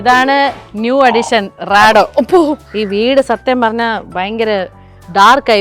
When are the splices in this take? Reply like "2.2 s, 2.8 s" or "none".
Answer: 2.7 s